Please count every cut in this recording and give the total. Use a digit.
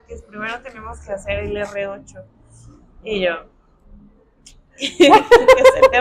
0